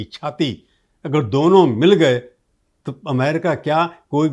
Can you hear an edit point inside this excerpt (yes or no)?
no